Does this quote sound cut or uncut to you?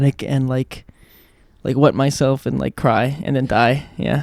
uncut